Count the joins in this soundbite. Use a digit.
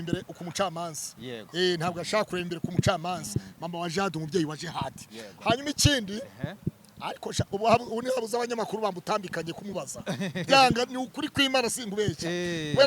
0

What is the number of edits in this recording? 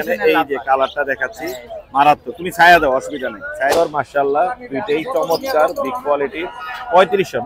1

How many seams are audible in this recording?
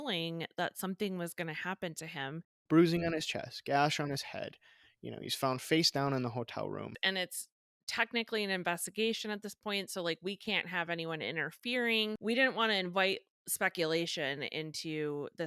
3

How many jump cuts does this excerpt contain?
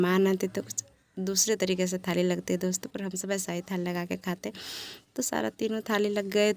0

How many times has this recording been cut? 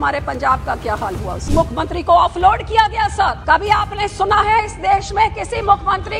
2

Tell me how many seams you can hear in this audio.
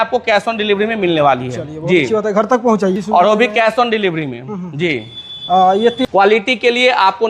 2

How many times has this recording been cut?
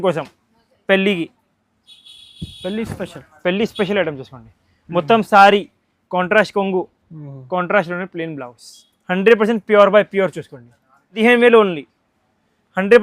1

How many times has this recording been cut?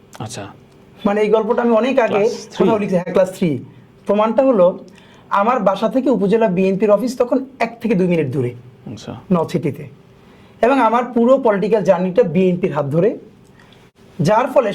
0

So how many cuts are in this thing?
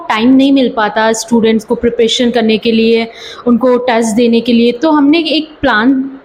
0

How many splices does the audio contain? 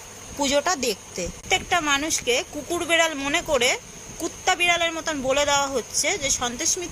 1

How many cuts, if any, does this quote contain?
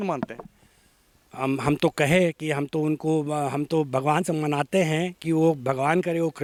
0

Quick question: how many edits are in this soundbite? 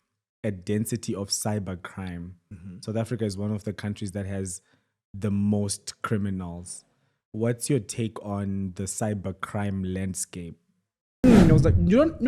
1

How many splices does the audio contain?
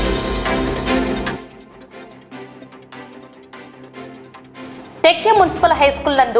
1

